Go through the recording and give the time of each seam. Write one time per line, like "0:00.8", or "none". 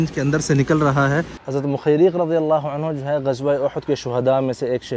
0:01.4